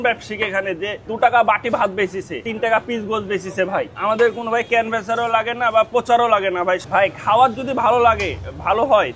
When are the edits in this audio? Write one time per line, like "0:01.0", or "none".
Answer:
0:02.4
0:03.9
0:06.8

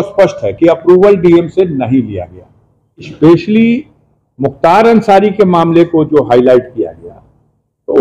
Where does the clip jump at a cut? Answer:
0:03.1

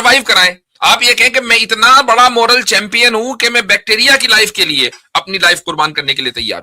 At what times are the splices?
none

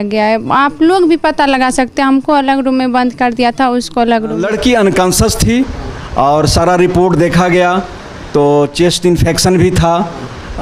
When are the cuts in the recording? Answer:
0:04.4

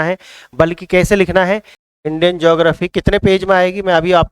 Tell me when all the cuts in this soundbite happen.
0:01.8

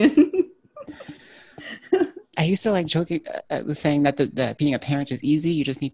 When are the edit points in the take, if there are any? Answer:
none

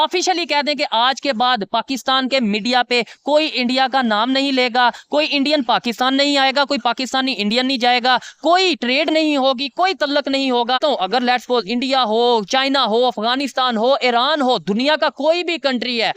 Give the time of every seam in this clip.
0:10.8

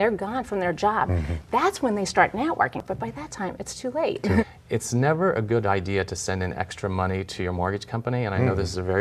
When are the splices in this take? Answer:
0:02.8
0:04.4

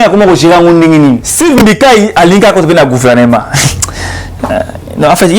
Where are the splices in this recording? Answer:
0:01.3

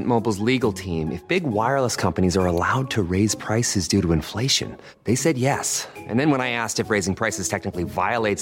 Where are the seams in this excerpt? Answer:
none

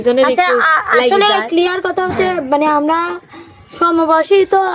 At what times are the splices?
none

